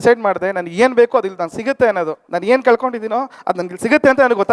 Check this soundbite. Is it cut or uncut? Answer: cut